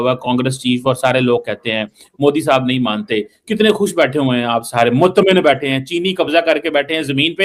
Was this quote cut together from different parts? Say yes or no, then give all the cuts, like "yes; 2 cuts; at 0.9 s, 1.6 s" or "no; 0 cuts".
no; 0 cuts